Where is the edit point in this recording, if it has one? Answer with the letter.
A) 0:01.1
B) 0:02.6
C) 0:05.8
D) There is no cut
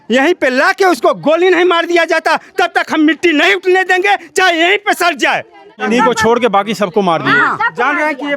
C